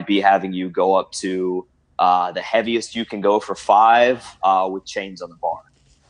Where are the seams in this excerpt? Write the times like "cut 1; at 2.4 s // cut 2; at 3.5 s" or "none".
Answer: none